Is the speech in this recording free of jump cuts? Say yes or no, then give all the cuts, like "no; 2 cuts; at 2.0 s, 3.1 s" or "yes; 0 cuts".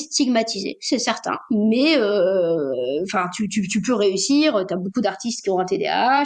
yes; 0 cuts